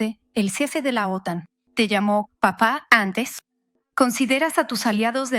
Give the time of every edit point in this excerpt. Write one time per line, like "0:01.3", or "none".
0:01.6